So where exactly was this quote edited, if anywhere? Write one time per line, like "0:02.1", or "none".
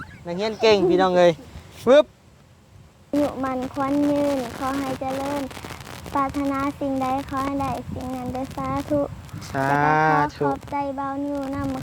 0:03.1